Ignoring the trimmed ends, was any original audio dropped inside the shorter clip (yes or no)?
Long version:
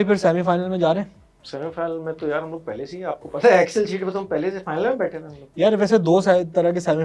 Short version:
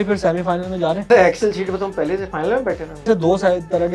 yes